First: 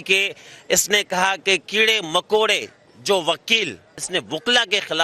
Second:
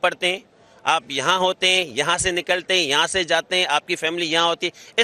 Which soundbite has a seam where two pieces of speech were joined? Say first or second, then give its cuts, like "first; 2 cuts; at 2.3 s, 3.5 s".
first; 1 cut; at 4.0 s